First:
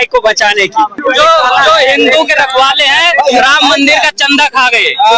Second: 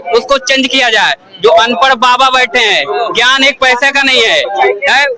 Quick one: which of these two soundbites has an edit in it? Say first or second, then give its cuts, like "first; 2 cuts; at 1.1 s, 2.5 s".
first; 1 cut; at 1.0 s